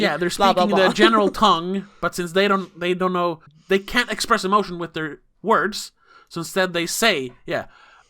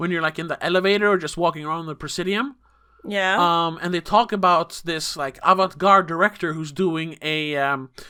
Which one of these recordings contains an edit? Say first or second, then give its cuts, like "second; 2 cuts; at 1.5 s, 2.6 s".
first; 1 cut; at 3.5 s